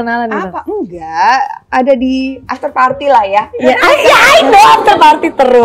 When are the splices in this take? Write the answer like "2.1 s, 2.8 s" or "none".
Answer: 2.4 s